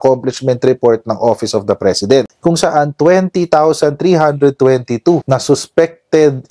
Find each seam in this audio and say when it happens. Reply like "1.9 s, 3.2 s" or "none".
2.3 s, 5.2 s